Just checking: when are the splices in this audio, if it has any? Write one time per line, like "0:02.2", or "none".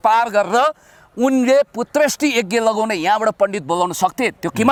none